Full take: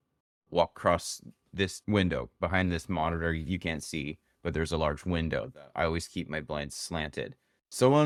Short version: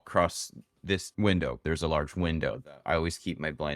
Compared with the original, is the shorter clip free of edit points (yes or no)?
no